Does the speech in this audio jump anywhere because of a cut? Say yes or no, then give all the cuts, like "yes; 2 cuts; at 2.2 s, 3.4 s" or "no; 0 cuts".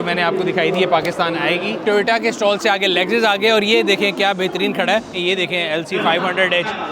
yes; 2 cuts; at 1.8 s, 5.1 s